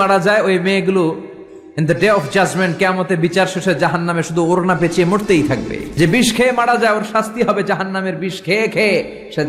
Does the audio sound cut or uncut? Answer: cut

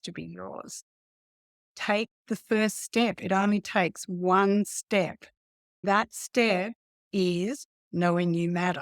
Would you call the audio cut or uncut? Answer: cut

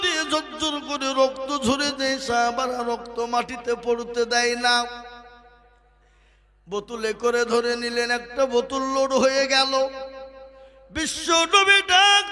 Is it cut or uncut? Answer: uncut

